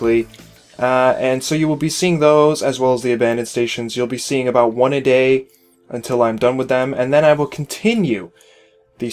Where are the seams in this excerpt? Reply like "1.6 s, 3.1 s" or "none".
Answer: 7.1 s